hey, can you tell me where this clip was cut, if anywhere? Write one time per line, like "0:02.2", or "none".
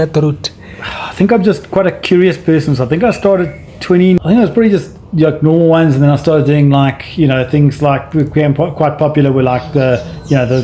0:04.2